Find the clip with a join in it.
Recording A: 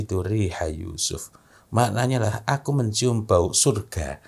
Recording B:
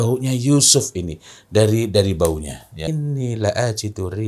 B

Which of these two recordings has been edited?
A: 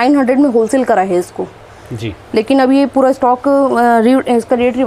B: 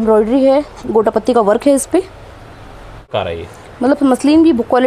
B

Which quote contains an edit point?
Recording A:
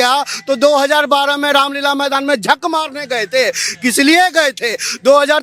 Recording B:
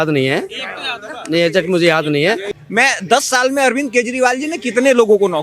B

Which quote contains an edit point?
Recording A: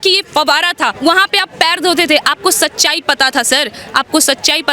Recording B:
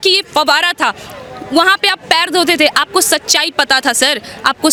A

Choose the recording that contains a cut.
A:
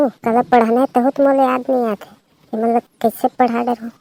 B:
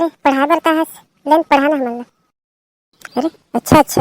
B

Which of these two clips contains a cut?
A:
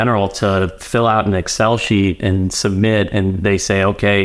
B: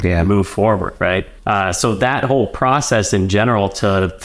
B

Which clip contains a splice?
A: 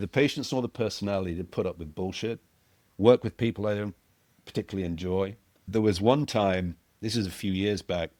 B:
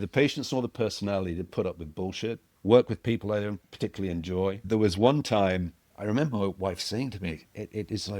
B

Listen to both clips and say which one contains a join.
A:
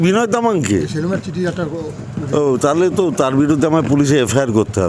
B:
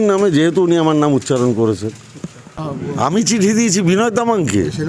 B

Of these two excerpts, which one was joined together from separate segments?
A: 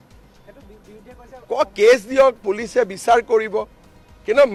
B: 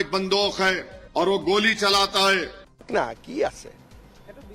B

